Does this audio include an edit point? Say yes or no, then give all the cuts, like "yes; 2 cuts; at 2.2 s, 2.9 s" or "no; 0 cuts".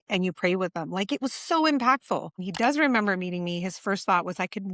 yes; 1 cut; at 2.5 s